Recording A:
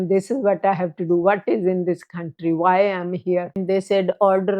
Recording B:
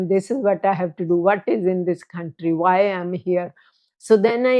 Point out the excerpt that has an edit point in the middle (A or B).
A